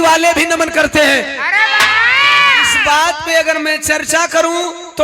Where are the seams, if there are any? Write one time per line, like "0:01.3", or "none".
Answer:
0:02.7

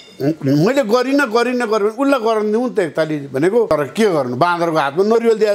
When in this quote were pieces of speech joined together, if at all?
0:03.7

